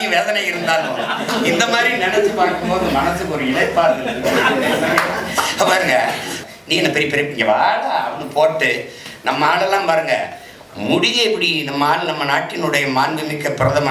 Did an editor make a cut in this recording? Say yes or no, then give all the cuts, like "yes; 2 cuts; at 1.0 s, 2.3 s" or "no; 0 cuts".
yes; 1 cut; at 6.4 s